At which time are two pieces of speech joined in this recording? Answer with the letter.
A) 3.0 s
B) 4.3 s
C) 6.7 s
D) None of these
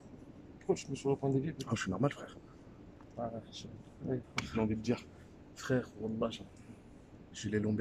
B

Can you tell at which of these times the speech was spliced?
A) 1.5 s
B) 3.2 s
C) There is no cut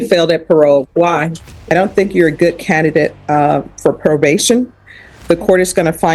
A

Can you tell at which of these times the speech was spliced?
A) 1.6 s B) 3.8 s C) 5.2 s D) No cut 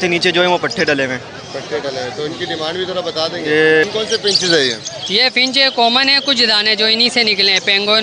B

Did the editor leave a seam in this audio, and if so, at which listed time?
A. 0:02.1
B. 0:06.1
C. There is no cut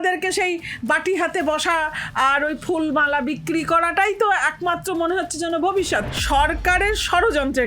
B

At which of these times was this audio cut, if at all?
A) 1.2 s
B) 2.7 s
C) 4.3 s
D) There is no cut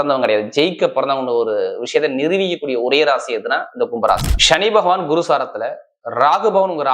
C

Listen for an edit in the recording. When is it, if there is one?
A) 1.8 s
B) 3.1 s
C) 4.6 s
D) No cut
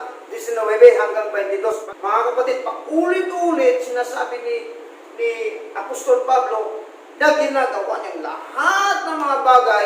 A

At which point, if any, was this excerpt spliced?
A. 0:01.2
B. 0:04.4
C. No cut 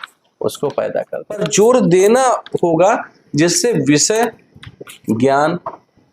A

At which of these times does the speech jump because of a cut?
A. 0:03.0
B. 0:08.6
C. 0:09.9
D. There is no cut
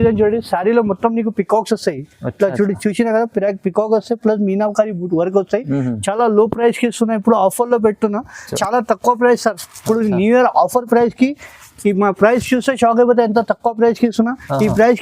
B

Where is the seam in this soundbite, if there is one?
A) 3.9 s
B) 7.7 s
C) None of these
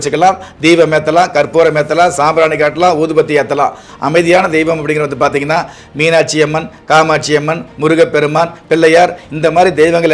A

